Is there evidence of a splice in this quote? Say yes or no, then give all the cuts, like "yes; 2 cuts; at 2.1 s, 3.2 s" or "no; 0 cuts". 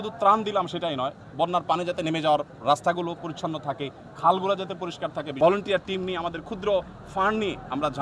yes; 1 cut; at 5.4 s